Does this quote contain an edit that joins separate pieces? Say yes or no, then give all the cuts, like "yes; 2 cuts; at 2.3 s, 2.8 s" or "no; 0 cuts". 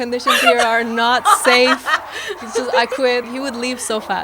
yes; 1 cut; at 3.3 s